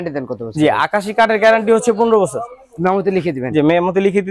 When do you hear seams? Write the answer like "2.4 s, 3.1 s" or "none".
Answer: none